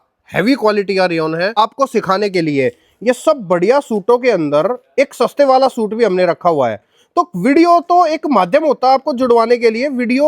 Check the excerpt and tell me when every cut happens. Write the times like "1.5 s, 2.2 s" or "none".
1.6 s

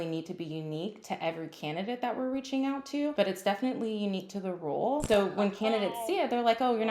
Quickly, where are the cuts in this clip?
3.1 s, 5.0 s

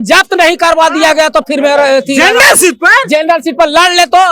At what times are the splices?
none

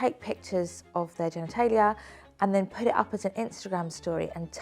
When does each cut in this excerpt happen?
none

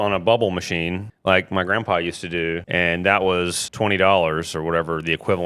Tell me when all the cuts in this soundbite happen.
1.1 s, 2.6 s, 3.6 s

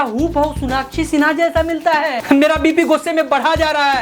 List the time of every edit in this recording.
2.2 s

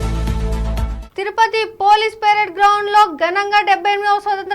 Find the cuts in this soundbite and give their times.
1.0 s

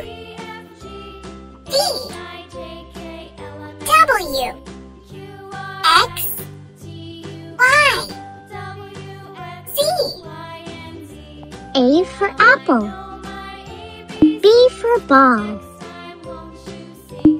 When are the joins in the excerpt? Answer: 10.2 s, 11.6 s

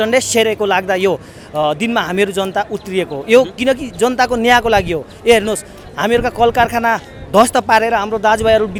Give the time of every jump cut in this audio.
none

